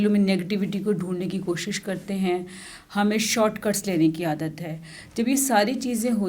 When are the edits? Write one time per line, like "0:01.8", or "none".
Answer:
none